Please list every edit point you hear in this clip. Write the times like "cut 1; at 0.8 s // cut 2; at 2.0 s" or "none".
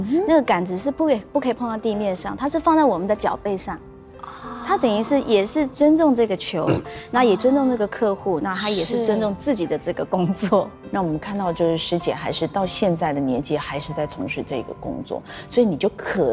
none